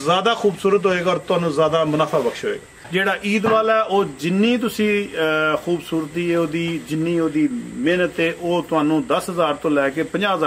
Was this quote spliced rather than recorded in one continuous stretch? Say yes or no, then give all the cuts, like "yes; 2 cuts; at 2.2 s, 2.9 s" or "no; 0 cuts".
yes; 1 cut; at 2.9 s